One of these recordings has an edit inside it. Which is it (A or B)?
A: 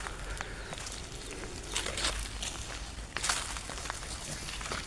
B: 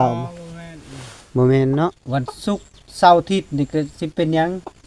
B